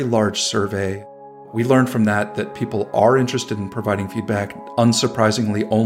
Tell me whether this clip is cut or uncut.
cut